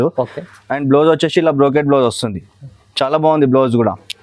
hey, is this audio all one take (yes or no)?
yes